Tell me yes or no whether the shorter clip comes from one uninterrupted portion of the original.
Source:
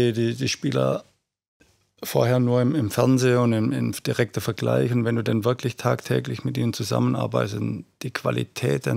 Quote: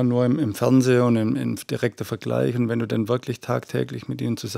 yes